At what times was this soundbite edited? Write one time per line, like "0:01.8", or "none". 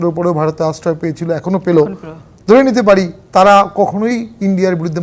none